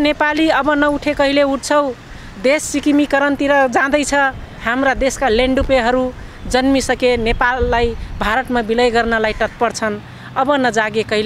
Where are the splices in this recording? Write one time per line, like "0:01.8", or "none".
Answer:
none